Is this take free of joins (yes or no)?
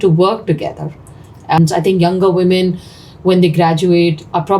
no